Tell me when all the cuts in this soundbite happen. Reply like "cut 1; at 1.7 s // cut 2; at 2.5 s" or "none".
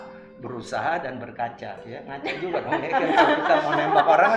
none